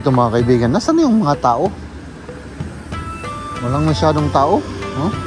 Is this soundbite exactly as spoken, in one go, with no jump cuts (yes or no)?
yes